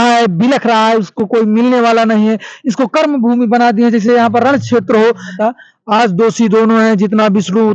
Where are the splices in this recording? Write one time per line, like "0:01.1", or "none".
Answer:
0:05.4